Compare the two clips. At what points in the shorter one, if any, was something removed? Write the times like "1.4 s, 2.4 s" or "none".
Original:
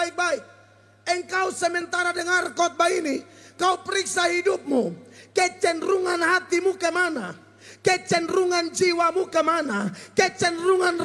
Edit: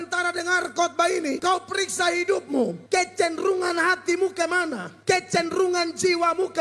1.4 s, 2.8 s, 4.9 s

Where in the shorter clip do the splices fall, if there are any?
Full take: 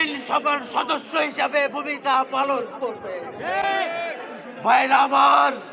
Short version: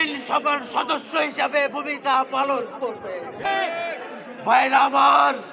3.4 s

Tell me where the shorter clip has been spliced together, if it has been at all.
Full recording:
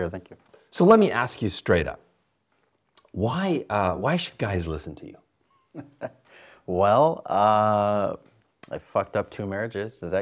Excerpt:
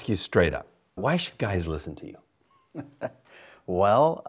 1.0 s

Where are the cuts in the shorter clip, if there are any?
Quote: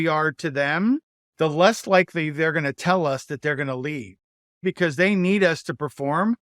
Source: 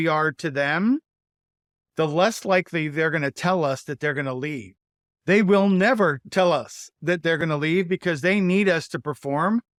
1.2 s, 4.6 s

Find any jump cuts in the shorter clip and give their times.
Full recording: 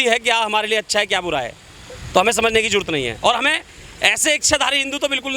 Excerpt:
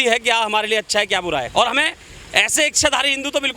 1.5 s

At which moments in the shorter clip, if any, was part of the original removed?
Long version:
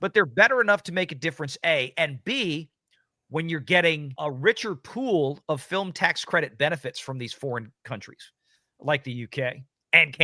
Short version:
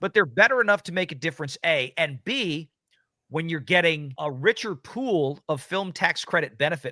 none

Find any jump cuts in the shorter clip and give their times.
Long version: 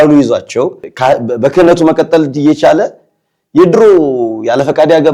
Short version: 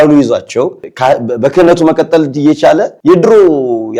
2.9 s

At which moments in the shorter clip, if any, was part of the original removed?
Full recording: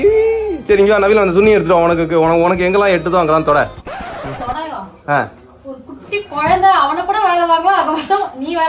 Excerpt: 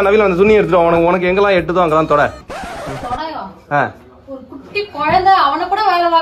1.0 s

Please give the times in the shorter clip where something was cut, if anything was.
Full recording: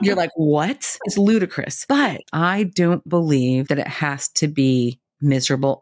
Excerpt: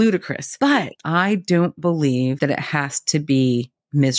none

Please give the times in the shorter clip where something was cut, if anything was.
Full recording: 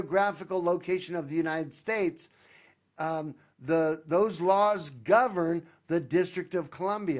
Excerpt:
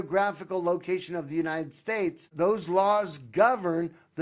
2.3 s

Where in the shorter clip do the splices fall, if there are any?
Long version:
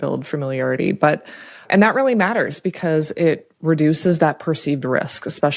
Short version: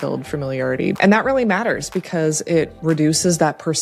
1.0 s, 2.7 s

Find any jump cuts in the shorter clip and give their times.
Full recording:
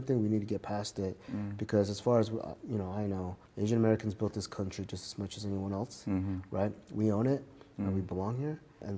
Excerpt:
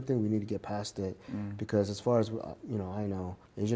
none

